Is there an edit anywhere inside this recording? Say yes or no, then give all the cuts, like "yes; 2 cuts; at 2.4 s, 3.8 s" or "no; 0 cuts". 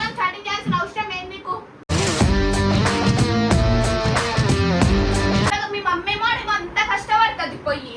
yes; 1 cut; at 5.5 s